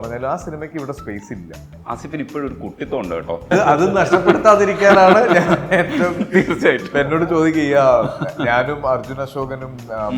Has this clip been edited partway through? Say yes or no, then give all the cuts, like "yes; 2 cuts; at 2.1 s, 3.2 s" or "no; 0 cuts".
yes; 2 cuts; at 1.7 s, 3.5 s